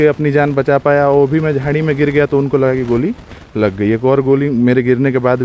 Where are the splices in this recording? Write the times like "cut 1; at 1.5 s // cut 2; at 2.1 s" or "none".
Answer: none